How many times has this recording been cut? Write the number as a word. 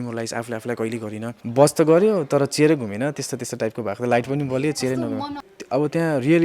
two